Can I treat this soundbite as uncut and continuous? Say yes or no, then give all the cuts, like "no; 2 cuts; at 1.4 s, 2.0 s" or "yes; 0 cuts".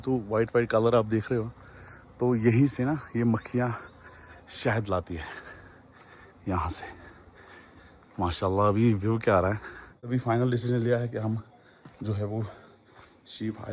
no; 1 cut; at 10.1 s